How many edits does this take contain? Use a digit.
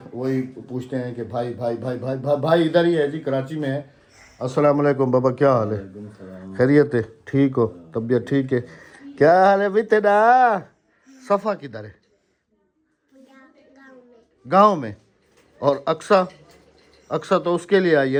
0